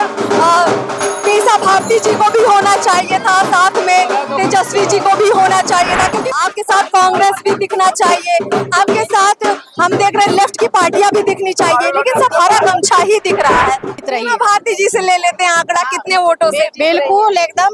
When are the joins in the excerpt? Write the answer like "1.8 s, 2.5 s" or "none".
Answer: 6.3 s, 13.9 s

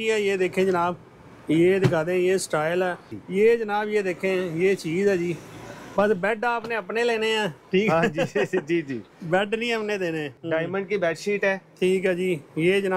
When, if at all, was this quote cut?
3.1 s, 10.3 s

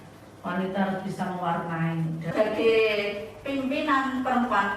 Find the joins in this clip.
2.3 s

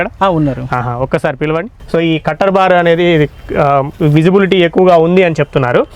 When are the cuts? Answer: 1.8 s

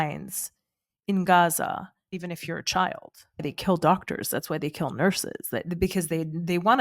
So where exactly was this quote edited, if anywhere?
2.1 s, 3.4 s

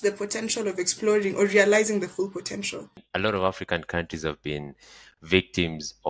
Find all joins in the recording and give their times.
3.0 s

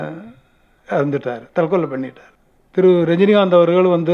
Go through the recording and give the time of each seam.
2.2 s

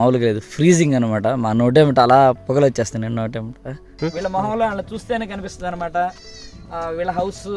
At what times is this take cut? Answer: 3.9 s

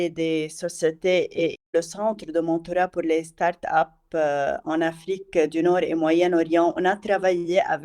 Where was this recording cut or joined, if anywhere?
1.6 s

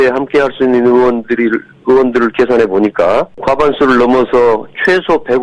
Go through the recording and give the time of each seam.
3.4 s

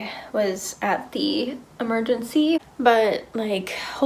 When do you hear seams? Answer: 2.6 s

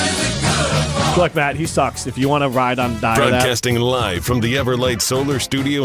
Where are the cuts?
3.5 s

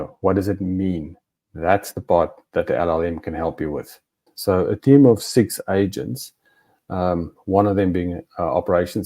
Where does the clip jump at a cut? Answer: 4.2 s

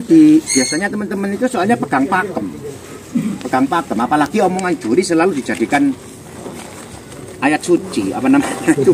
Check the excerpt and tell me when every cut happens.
none

